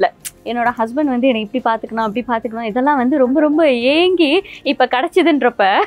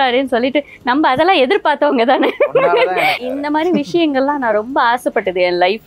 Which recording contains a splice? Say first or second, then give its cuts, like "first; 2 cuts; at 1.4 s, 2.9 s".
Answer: second; 1 cut; at 3.2 s